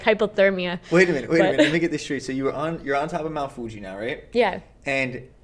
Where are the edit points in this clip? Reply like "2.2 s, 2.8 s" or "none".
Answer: none